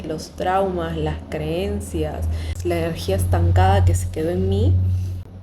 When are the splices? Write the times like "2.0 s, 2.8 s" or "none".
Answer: 2.5 s